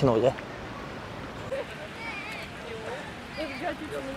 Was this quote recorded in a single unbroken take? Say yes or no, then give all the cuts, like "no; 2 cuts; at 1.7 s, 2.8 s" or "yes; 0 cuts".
no; 1 cut; at 1.5 s